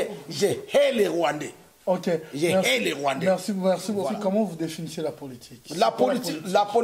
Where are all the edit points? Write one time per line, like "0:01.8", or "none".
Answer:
0:04.1